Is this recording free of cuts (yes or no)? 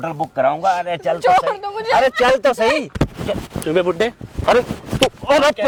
yes